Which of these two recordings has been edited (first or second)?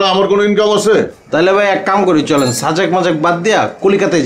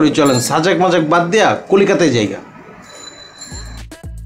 first